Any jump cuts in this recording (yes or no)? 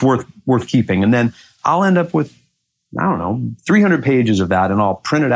no